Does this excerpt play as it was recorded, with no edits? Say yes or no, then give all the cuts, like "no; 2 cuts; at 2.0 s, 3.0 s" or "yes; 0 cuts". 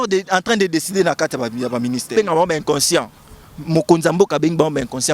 no; 1 cut; at 2.1 s